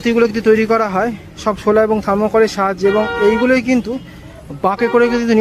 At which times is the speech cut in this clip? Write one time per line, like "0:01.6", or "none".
0:03.9